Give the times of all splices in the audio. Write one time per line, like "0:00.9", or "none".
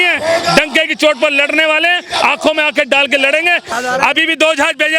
0:03.7